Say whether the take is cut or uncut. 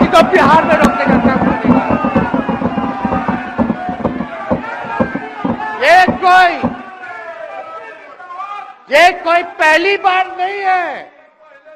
uncut